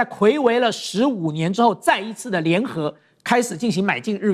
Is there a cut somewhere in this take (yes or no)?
no